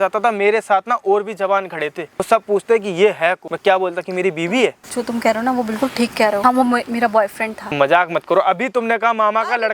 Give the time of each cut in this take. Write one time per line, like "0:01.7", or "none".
0:02.2
0:03.5
0:04.8
0:06.4
0:07.7